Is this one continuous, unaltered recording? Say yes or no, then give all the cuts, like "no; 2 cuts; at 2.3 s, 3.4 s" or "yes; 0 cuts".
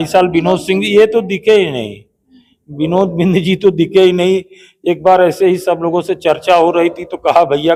yes; 0 cuts